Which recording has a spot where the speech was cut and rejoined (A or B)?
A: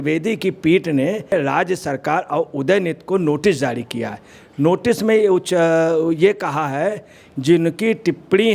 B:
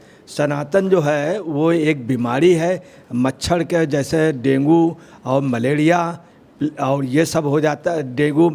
A